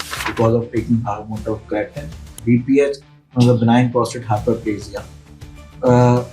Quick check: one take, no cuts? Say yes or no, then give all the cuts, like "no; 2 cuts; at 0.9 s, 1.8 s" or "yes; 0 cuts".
no; 1 cut; at 2.3 s